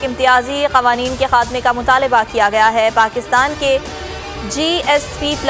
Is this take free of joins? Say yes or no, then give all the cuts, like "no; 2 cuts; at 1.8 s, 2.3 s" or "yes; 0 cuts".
yes; 0 cuts